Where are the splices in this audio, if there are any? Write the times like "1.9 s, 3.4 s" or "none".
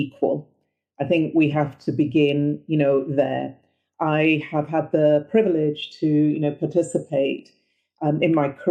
none